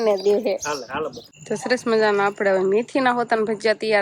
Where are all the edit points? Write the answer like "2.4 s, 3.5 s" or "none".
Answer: 1.3 s